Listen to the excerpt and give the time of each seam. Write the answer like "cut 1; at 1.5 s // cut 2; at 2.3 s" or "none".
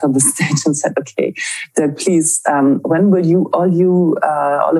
none